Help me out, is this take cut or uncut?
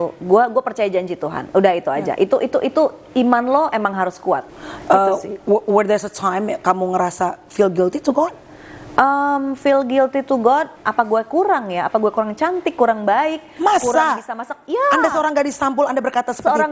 cut